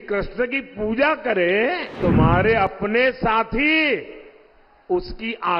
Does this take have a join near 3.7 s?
no; 1 cut; at 2.0 s

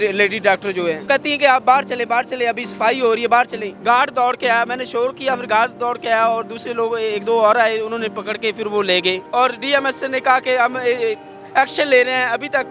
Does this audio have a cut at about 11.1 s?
no; 3 cuts; at 1.0 s, 3.7 s, 9.2 s

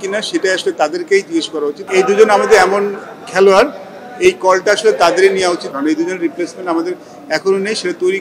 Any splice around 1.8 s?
yes; 2 cuts; at 1.8 s, 5.6 s

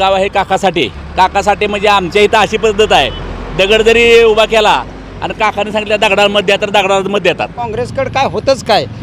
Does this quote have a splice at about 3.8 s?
no; 2 cuts; at 1.0 s, 7.6 s

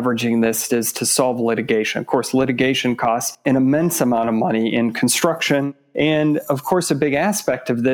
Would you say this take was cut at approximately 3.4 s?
yes; 2 cuts; at 3.4 s, 5.7 s

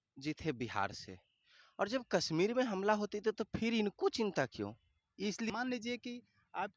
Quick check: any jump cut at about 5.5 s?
yes; 1 cut; at 5.5 s

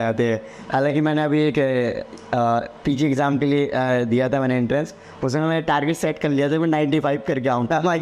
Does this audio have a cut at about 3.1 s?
no; 0 cuts

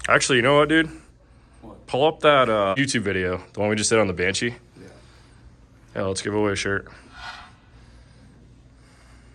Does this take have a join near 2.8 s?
yes; 1 cut; at 2.8 s

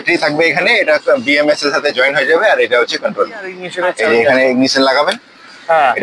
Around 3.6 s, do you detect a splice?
yes; 1 cut; at 3.6 s

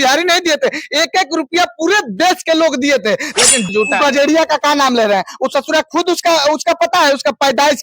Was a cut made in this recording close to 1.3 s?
no; 1 cut; at 3.7 s

